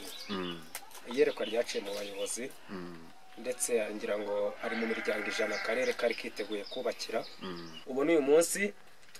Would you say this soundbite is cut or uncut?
cut